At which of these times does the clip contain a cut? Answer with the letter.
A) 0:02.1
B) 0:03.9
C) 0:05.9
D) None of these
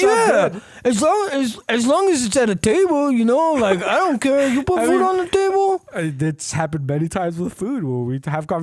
D